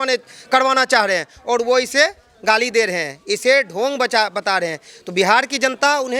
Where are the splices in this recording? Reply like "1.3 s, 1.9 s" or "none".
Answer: none